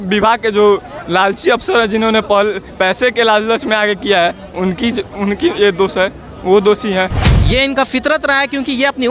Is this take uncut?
no; 1 cut; at 7.3 s

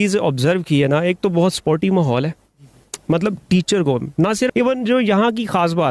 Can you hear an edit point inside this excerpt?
yes; 1 cut; at 4.5 s

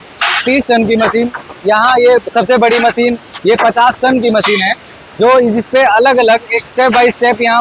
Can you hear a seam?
no; 0 cuts

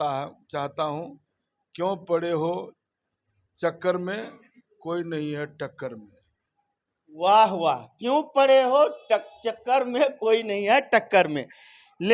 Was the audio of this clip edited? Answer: no; 0 cuts

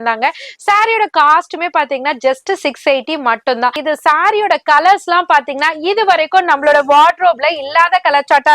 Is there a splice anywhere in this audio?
yes; 1 cut; at 3.8 s

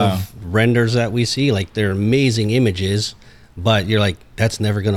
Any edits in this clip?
no; 0 cuts

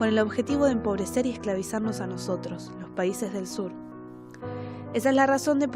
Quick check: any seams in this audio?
yes; 1 cut; at 4.8 s

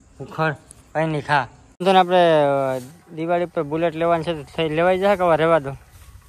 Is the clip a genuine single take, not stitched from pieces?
no; 1 cut; at 1.8 s

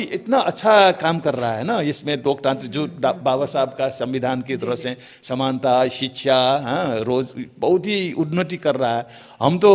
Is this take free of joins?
yes; 0 cuts

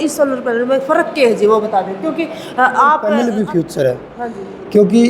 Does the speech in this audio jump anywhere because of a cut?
yes; 1 cut; at 3.2 s

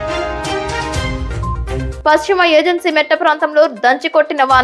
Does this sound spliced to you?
no; 0 cuts

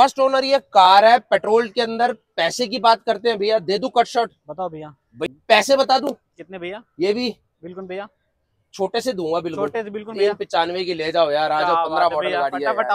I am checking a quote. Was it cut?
yes; 1 cut; at 5.3 s

